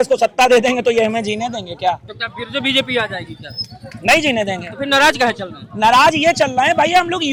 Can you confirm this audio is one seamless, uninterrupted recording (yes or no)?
yes